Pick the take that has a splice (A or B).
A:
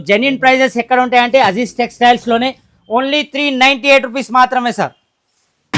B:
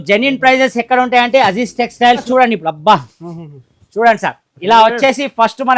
B